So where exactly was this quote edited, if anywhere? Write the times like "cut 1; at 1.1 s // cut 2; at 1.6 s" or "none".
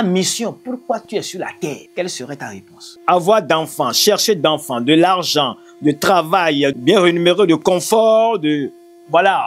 cut 1; at 1.9 s // cut 2; at 2.8 s // cut 3; at 6.7 s